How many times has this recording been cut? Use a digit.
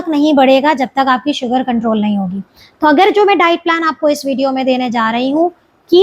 0